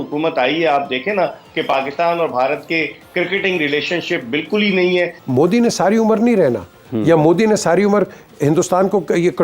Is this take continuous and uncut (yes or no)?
no